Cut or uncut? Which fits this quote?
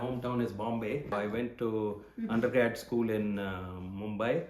cut